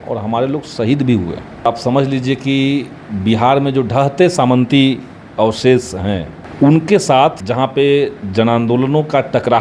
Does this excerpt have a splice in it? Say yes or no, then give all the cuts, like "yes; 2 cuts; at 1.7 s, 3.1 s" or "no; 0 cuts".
yes; 3 cuts; at 1.7 s, 6.4 s, 7.4 s